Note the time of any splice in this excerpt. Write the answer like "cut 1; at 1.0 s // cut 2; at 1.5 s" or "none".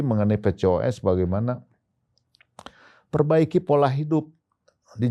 none